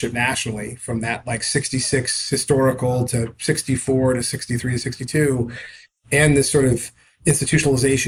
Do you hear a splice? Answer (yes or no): no